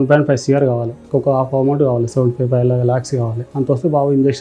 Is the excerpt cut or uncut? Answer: cut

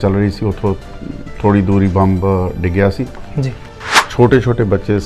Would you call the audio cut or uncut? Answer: cut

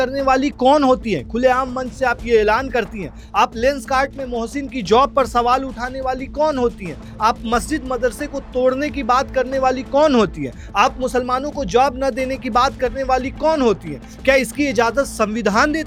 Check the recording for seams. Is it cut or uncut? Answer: uncut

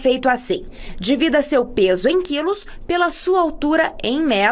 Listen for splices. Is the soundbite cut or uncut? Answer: uncut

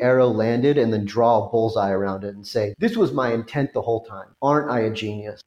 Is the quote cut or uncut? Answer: uncut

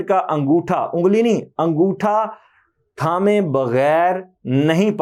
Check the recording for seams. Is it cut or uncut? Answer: uncut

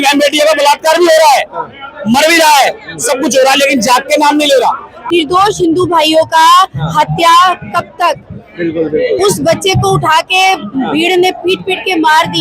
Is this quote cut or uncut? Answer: cut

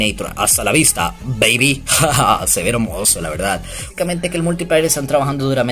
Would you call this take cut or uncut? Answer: cut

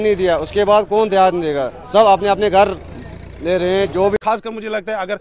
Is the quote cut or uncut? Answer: cut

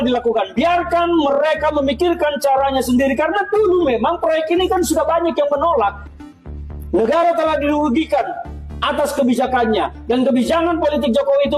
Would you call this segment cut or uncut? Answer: cut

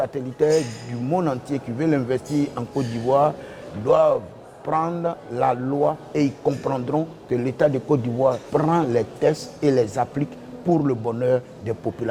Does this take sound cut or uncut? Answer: cut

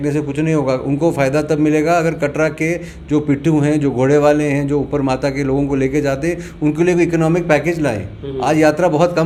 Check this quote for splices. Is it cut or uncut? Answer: uncut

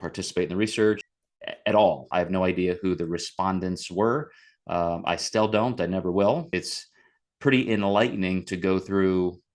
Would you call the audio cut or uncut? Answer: cut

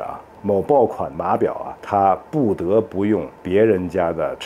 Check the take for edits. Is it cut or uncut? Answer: cut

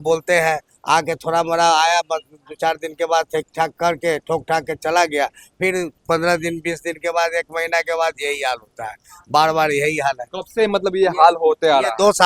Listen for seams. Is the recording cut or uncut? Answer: uncut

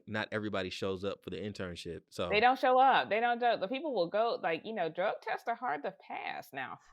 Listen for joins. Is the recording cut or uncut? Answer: uncut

